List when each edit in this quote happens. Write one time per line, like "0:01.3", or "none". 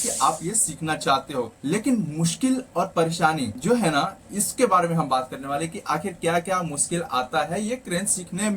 0:01.5
0:03.5

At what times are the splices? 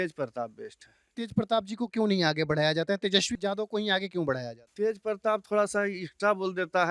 0:01.2

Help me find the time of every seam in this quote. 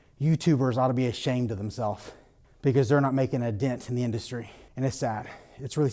0:04.6

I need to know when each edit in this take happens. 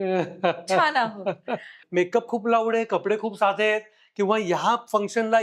0:01.7

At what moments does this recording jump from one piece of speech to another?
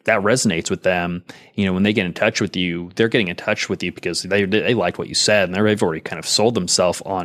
none

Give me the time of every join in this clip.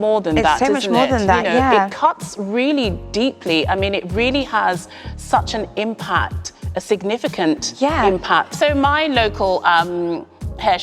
none

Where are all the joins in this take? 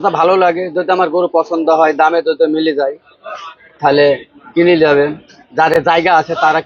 none

